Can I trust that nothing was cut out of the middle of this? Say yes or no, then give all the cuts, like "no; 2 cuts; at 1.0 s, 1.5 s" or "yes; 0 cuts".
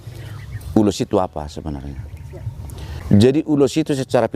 no; 1 cut; at 3.0 s